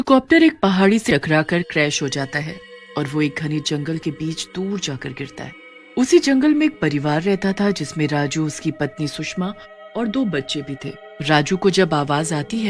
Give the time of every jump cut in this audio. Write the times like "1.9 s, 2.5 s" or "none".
1.1 s